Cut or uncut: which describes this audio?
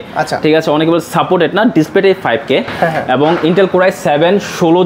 uncut